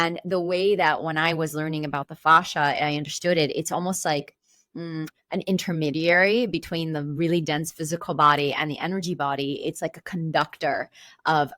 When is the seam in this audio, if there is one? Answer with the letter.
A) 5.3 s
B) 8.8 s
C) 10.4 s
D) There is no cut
D